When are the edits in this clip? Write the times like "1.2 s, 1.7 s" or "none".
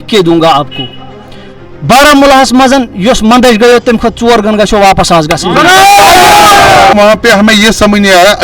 6.9 s